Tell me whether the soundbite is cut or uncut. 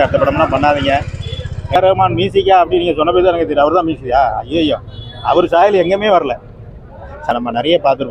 cut